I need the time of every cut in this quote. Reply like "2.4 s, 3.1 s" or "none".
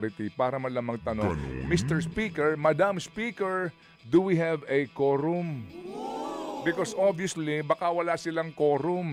none